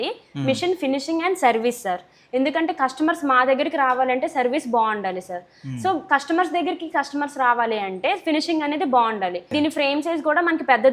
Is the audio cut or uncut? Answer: cut